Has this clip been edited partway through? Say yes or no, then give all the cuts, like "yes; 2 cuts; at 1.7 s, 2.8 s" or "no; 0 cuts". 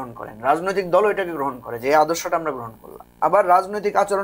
no; 0 cuts